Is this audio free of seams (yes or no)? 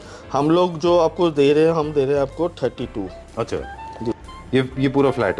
no